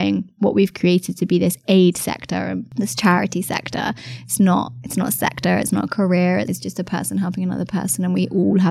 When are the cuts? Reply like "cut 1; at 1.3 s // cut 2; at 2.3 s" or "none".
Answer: cut 1; at 2.6 s